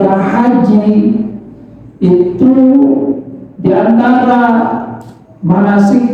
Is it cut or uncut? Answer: uncut